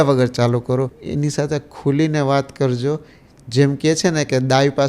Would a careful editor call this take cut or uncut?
cut